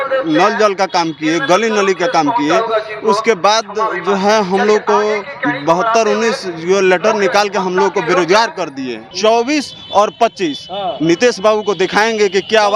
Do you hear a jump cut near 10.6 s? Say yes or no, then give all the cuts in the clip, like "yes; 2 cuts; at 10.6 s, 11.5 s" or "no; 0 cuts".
no; 1 cut; at 9.1 s